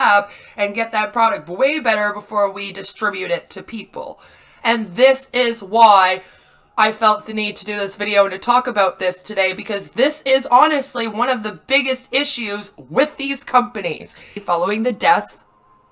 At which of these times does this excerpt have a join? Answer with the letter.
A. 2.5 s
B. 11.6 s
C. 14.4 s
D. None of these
C